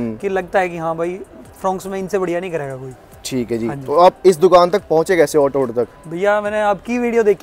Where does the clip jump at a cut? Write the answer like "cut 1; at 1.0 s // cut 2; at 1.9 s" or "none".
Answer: none

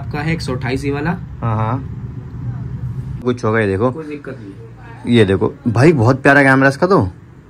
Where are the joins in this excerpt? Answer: cut 1; at 3.2 s

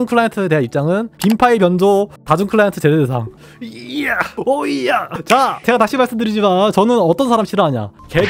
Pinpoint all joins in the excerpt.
cut 1; at 1.1 s // cut 2; at 5.6 s

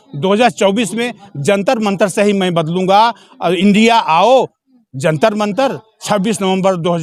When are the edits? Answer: none

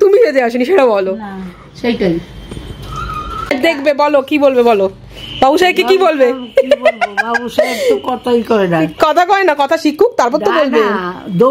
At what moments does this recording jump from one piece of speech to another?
cut 1; at 3.5 s

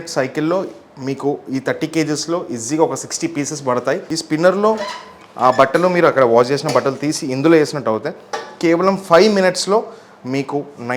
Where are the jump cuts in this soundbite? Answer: cut 1; at 4.1 s

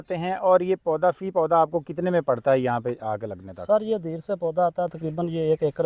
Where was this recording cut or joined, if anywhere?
none

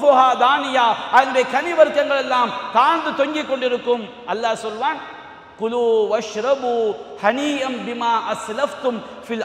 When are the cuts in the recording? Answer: none

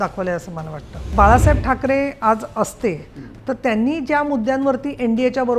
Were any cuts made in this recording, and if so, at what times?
cut 1; at 1.1 s

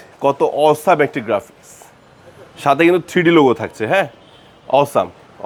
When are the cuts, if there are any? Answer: none

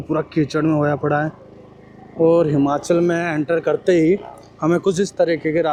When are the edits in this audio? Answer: none

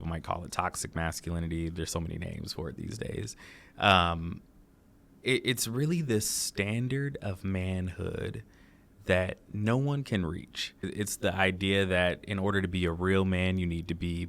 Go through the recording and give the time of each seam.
cut 1; at 10.9 s

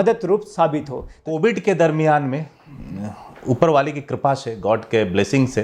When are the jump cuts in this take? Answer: cut 1; at 1.2 s

